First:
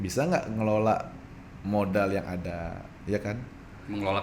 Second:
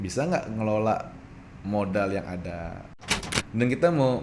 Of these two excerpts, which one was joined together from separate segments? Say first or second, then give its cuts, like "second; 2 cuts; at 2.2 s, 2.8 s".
second; 1 cut; at 3.0 s